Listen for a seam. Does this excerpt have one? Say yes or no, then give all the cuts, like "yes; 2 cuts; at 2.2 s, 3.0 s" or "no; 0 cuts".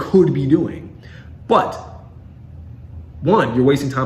no; 0 cuts